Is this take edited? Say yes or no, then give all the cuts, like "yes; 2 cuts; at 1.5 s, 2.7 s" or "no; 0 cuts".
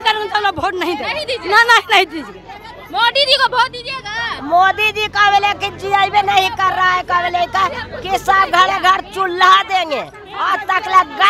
no; 0 cuts